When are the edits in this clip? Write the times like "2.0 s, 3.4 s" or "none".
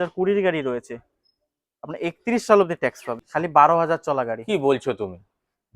3.3 s